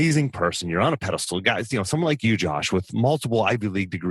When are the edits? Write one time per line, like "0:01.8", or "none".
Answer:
none